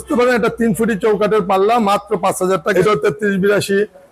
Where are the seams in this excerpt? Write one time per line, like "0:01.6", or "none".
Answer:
0:02.7